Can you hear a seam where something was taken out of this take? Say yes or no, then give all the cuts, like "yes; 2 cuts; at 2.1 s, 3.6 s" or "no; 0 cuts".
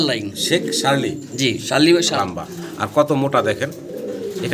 yes; 1 cut; at 2.2 s